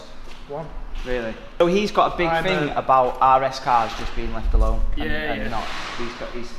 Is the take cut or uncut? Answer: uncut